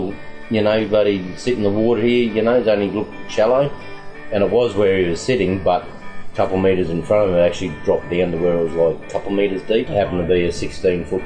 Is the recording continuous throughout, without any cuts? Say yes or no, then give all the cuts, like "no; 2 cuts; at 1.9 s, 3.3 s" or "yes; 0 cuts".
no; 1 cut; at 9.9 s